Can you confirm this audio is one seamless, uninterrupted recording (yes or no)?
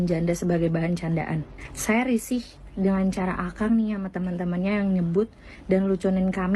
yes